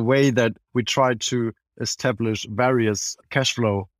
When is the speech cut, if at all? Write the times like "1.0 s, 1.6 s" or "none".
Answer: none